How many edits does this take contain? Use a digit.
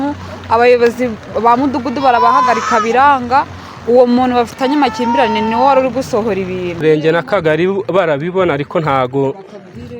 1